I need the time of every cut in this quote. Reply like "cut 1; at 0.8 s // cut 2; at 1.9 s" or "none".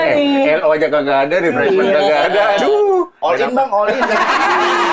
none